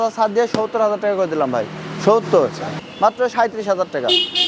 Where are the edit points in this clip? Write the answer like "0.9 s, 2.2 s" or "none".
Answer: 2.7 s